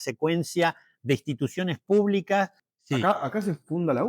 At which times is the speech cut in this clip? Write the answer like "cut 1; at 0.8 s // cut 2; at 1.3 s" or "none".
cut 1; at 2.5 s